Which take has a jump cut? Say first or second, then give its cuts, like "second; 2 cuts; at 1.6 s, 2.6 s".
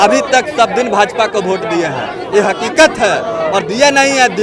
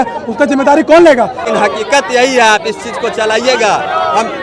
second; 1 cut; at 1.4 s